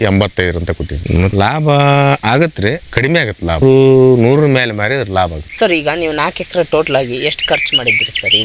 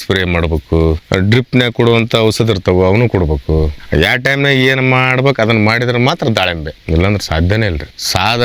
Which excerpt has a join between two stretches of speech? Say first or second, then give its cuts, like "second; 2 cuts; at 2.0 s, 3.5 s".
first; 3 cuts; at 1.3 s, 2.2 s, 3.6 s